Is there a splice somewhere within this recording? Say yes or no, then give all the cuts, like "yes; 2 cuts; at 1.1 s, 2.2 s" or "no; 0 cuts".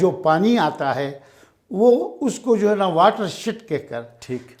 no; 0 cuts